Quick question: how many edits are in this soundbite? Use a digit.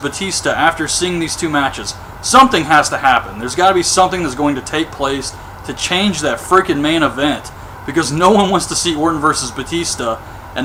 0